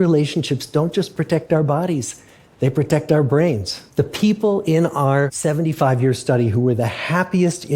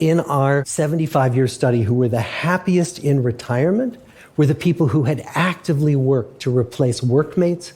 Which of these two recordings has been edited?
first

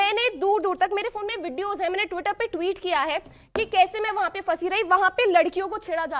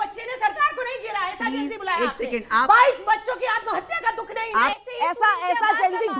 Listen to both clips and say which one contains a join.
second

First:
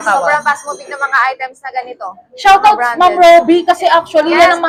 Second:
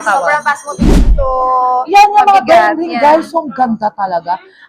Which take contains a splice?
second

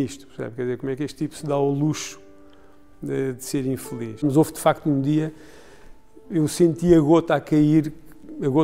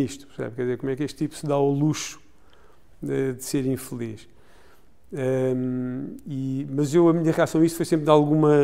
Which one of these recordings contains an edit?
first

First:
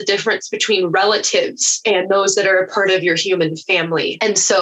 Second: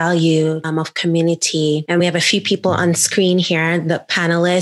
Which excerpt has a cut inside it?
first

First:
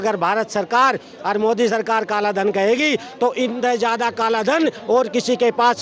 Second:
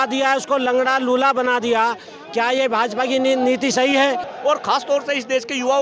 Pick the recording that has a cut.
second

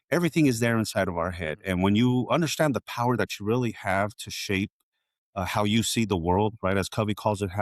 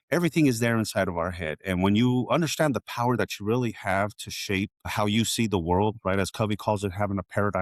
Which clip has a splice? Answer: second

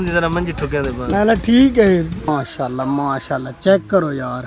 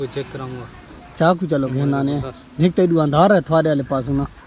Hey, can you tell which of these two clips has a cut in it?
first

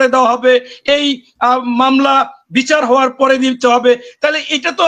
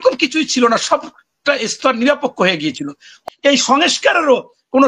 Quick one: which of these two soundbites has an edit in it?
second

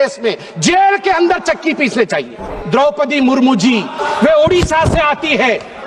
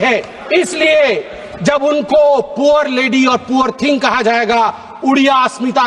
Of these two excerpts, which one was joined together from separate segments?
first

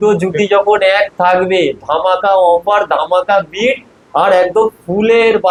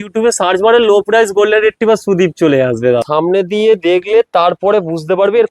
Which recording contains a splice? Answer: second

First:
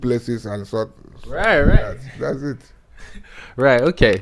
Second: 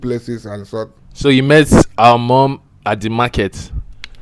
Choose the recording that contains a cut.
second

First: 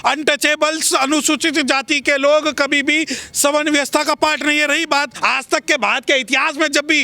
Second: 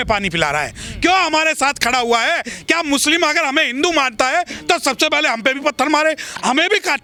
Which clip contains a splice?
first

